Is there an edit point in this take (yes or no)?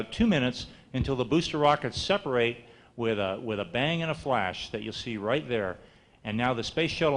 no